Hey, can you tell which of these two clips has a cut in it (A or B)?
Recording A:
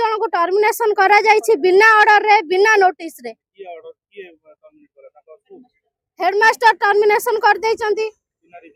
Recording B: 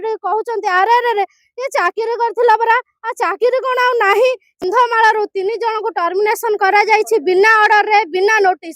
B